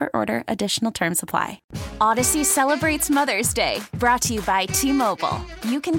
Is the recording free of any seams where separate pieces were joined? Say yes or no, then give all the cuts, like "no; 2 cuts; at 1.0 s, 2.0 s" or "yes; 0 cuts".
no; 1 cut; at 1.6 s